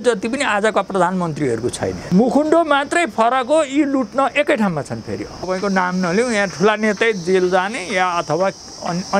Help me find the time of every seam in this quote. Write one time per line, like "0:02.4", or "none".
0:01.9
0:05.4